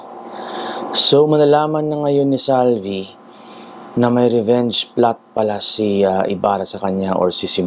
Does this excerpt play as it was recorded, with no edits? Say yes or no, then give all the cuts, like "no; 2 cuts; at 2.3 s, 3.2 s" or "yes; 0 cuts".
yes; 0 cuts